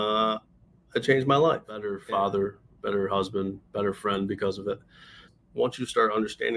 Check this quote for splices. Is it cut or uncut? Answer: cut